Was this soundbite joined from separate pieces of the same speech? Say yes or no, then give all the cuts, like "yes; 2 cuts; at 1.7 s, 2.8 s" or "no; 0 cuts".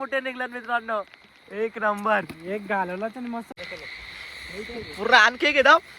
yes; 1 cut; at 3.5 s